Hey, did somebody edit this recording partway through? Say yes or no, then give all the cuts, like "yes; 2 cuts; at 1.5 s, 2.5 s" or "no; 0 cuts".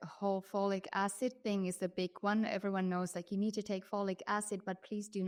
no; 0 cuts